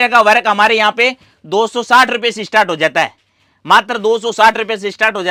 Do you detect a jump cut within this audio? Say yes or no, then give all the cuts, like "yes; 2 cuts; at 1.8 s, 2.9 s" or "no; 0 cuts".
no; 0 cuts